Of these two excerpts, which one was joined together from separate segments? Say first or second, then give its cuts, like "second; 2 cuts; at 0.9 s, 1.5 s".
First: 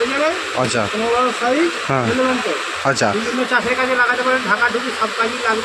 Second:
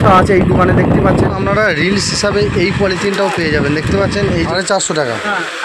second; 2 cuts; at 1.3 s, 4.5 s